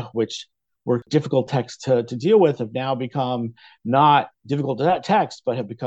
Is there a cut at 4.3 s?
no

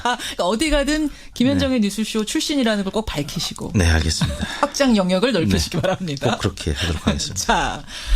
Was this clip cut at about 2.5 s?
yes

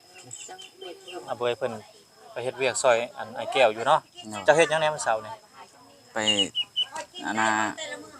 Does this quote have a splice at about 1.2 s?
yes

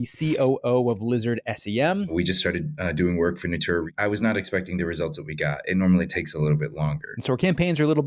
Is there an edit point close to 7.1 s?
yes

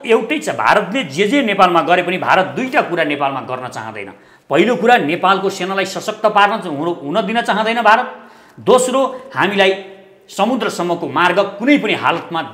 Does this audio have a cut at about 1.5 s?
no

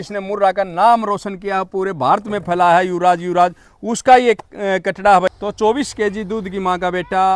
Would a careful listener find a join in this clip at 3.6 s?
no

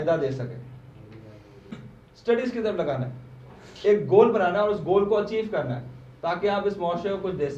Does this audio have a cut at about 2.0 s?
yes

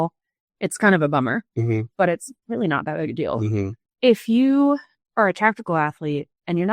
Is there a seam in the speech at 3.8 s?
yes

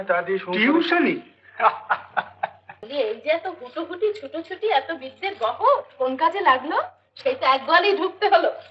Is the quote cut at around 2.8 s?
yes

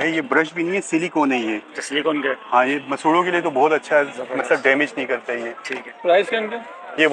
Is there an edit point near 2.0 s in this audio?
no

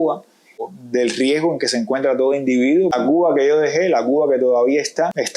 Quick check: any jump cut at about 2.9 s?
yes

